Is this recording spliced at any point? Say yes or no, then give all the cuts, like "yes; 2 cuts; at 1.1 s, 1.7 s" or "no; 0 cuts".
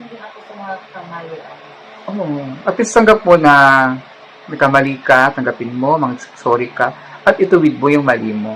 no; 0 cuts